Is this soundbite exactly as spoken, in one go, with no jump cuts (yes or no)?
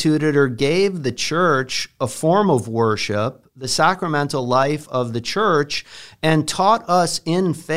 yes